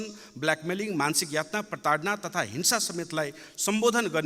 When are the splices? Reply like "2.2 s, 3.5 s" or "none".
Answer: none